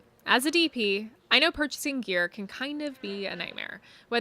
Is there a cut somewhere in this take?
yes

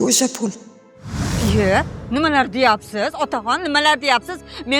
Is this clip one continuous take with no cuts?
no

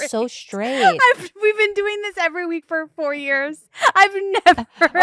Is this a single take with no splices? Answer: yes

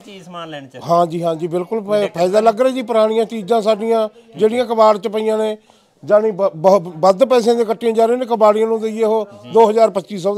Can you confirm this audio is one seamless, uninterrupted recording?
yes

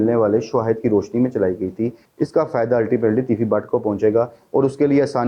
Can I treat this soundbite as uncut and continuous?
no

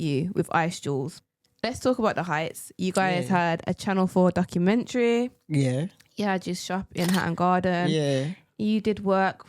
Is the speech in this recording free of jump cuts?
no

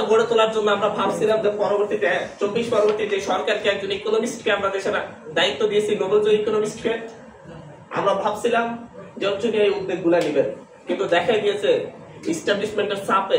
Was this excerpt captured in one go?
yes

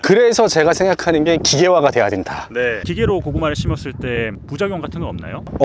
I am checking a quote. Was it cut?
no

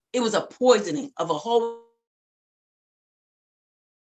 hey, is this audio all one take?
yes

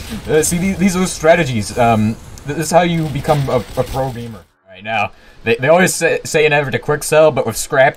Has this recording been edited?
yes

